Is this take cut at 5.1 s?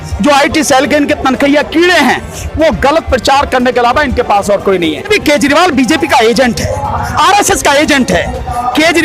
yes; 1 cut; at 5.1 s

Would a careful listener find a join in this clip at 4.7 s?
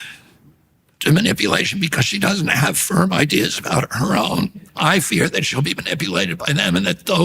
yes; 1 cut; at 4.7 s

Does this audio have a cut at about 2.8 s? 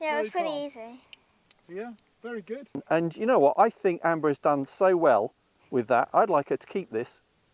yes; 1 cut; at 2.8 s

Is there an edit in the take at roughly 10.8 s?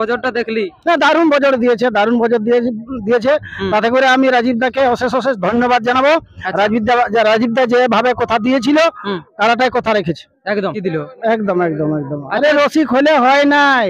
yes; 1 cut; at 10.8 s

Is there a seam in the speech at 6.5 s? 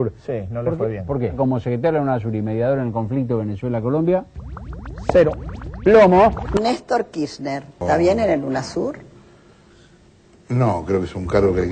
yes; 1 cut; at 6.5 s

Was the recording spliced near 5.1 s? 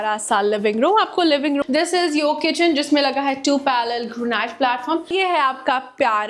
yes; 2 cuts; at 1.6 s, 5.1 s

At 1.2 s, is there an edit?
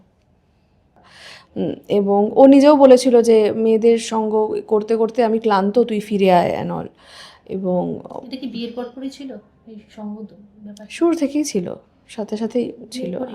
yes; 1 cut; at 1.2 s

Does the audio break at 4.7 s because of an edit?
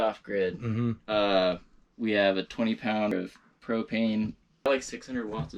yes; 2 cuts; at 3.1 s, 4.7 s

